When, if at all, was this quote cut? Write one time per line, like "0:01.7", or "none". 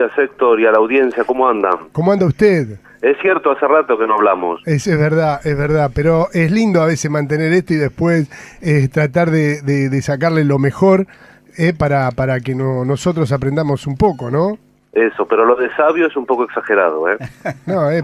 0:02.9